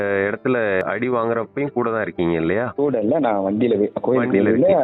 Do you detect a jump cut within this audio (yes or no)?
yes